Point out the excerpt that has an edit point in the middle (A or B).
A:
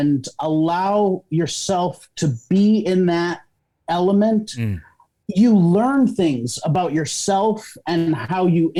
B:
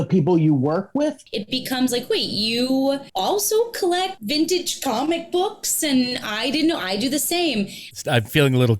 B